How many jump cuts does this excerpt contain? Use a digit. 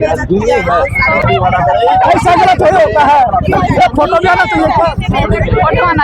1